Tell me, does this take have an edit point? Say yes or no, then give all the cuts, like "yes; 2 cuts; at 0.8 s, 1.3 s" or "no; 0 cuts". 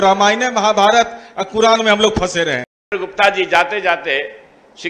no; 0 cuts